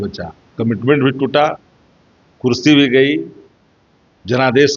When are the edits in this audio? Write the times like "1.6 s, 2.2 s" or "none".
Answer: none